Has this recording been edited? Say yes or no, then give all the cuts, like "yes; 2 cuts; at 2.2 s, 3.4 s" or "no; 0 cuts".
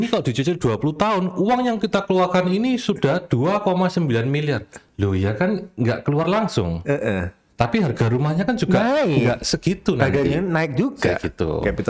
no; 0 cuts